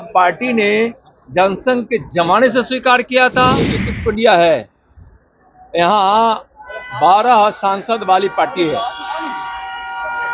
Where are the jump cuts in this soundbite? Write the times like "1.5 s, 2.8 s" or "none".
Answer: 3.9 s